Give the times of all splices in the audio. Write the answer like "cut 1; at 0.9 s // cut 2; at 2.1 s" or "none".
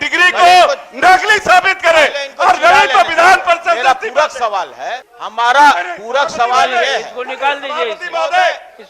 cut 1; at 5.1 s